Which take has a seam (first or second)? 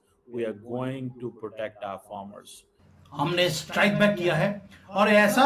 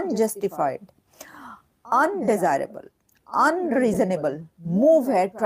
first